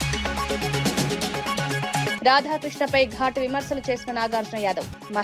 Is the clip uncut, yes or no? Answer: no